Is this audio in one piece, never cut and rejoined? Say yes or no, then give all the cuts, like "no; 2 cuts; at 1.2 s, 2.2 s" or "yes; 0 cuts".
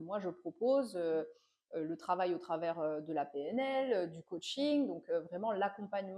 yes; 0 cuts